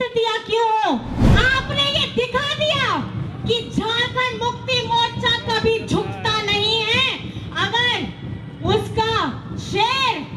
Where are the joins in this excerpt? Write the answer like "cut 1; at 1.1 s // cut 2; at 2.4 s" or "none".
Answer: cut 1; at 1.2 s